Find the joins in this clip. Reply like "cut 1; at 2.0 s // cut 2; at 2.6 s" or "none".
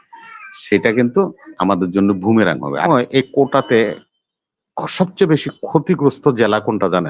cut 1; at 2.9 s